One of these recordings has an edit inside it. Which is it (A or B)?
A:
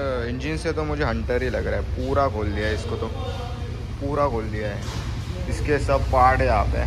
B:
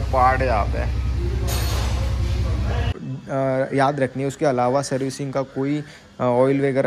B